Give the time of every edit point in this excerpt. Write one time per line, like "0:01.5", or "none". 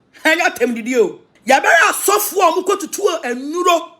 0:01.3